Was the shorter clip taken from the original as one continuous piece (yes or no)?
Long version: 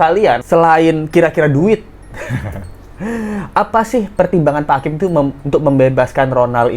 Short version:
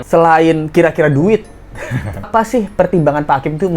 no